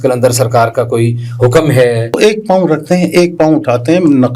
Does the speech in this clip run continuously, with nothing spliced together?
no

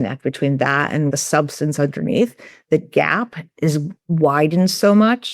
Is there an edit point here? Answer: yes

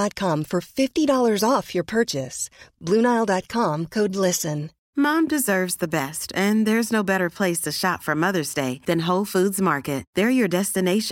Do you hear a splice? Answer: yes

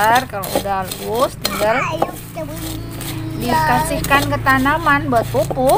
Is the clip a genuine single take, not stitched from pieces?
yes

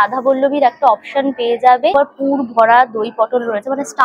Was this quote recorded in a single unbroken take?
no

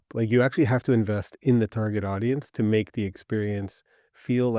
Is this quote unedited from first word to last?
yes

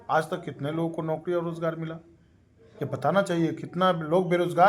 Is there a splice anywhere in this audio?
no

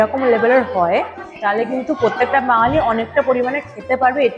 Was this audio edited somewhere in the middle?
no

